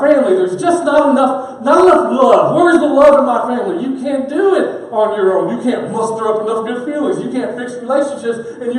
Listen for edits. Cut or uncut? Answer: uncut